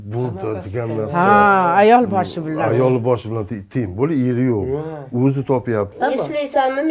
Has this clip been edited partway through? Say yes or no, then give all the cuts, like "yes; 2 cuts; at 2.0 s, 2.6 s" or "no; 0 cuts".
yes; 1 cut; at 5.9 s